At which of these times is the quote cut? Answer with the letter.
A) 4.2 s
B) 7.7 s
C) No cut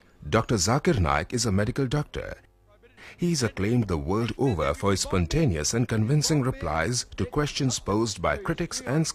B